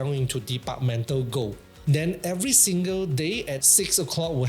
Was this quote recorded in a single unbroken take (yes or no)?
no